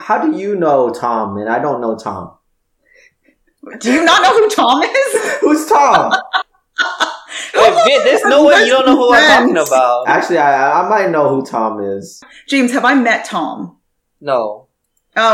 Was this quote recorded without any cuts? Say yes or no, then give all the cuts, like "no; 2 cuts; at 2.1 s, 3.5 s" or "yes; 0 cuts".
no; 1 cut; at 12.3 s